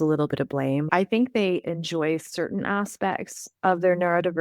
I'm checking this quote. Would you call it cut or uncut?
cut